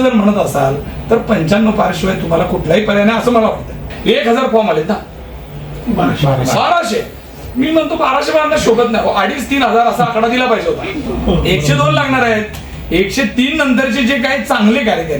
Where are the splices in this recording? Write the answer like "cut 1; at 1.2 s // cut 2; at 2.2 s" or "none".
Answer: cut 1; at 3.9 s // cut 2; at 10.9 s